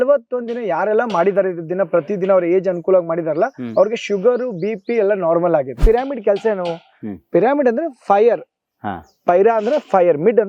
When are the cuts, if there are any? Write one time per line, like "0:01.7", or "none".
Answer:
0:05.8